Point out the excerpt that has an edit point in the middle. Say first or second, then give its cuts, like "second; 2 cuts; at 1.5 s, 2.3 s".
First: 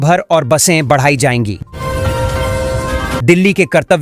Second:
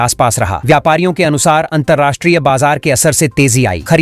first; 2 cuts; at 1.7 s, 3.2 s